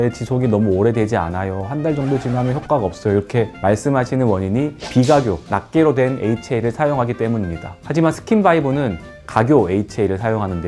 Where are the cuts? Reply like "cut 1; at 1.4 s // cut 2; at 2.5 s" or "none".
none